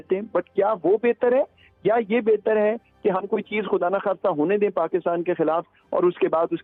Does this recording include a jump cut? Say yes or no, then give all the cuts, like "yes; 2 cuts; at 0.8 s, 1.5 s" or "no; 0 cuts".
no; 0 cuts